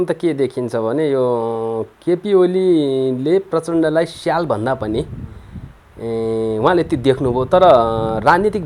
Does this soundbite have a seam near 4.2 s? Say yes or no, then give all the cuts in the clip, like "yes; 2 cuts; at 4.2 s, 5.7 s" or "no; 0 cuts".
no; 0 cuts